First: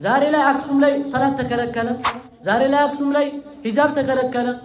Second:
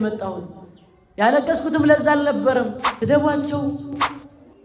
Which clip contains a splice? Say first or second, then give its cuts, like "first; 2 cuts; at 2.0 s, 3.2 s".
second; 1 cut; at 2.8 s